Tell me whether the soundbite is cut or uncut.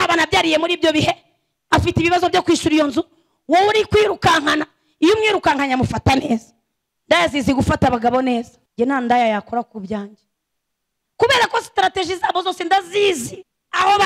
cut